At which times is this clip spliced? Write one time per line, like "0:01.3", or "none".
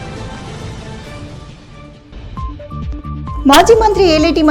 0:02.0